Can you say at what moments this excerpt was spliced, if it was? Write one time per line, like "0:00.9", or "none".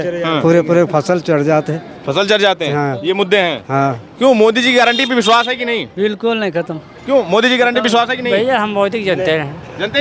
none